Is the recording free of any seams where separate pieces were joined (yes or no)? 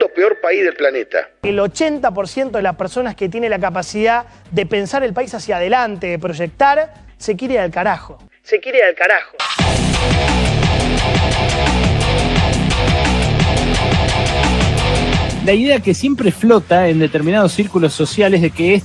yes